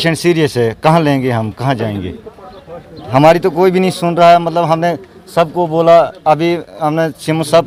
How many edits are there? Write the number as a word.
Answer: zero